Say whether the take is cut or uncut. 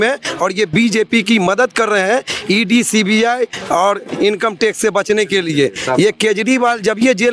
uncut